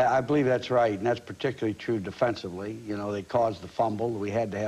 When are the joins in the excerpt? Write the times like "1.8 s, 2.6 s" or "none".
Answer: 1.0 s